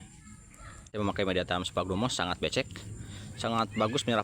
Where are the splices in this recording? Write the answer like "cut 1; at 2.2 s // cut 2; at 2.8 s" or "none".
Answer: cut 1; at 0.9 s